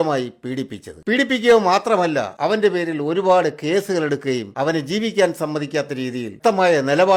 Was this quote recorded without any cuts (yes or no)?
yes